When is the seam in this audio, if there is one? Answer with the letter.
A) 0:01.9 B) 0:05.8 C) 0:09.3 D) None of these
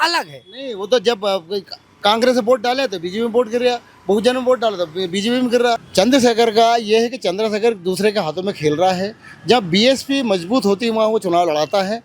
B